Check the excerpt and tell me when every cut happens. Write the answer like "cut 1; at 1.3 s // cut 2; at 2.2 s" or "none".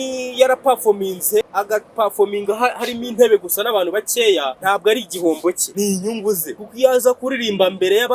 cut 1; at 1.4 s // cut 2; at 4.5 s // cut 3; at 5.6 s // cut 4; at 6.7 s